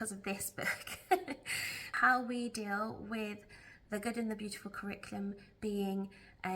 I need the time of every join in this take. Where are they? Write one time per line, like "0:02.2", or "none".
0:01.9